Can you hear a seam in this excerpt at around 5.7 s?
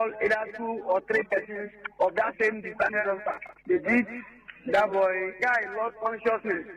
no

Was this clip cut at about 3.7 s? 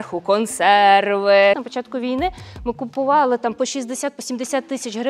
no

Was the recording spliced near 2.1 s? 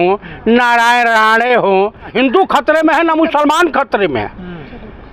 yes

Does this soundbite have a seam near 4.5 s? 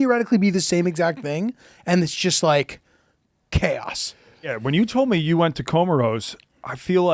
yes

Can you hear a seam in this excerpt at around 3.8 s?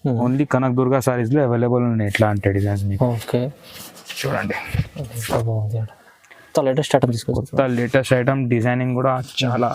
no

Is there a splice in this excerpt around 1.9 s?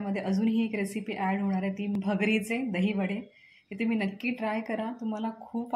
yes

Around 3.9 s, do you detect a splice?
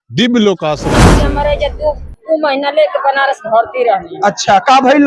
no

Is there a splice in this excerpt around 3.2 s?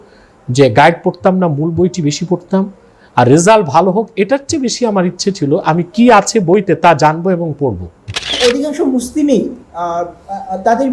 no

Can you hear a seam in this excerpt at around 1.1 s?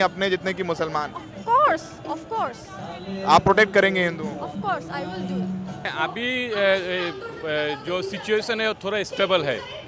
no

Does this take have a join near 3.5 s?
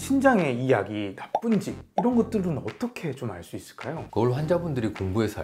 no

